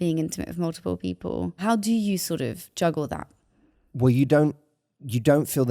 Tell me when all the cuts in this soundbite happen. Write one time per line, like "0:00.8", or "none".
0:01.6